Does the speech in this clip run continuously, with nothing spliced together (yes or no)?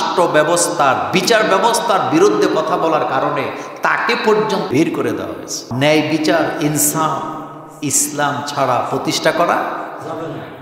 no